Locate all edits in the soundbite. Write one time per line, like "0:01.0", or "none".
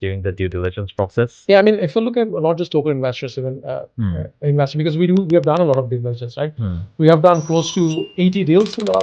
none